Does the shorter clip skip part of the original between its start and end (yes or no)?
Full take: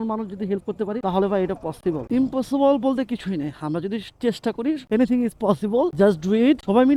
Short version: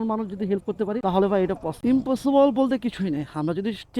yes